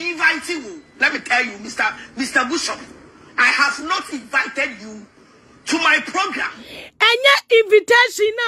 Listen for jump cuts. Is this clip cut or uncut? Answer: uncut